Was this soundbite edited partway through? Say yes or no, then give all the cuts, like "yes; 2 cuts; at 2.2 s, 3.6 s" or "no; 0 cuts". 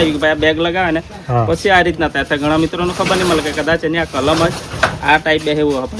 no; 0 cuts